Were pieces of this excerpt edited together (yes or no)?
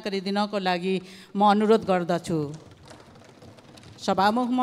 no